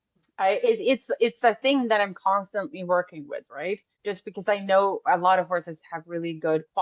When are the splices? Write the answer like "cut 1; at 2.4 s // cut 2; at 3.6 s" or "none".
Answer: cut 1; at 3.9 s